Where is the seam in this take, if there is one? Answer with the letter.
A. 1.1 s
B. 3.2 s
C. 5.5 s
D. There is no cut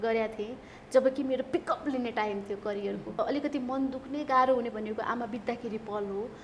B